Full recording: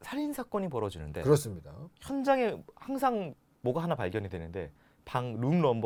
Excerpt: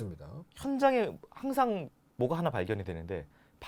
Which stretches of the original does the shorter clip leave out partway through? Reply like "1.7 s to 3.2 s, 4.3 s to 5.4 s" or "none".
none